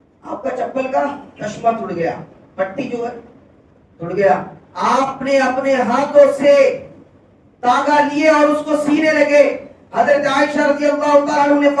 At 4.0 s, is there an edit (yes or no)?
no